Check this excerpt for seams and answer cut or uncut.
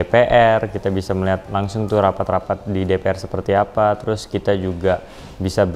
uncut